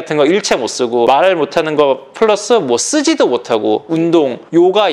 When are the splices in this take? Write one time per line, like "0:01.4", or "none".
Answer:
none